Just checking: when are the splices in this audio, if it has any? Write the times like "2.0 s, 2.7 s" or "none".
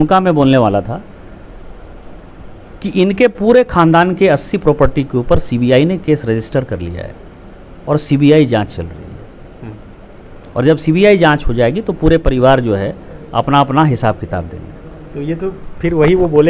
none